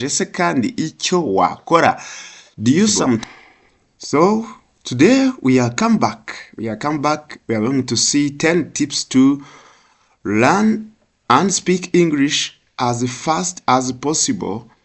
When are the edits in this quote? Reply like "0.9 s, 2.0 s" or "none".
3.2 s